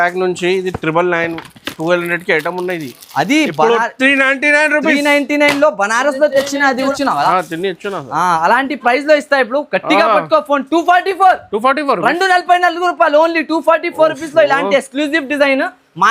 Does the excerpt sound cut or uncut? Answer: cut